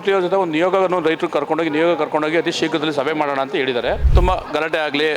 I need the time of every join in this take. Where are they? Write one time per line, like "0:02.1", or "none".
0:04.0